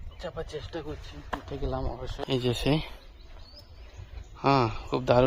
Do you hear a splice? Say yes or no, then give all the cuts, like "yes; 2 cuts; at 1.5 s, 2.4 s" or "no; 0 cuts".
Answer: yes; 1 cut; at 2.1 s